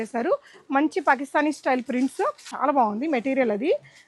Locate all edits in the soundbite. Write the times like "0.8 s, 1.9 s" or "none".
2.5 s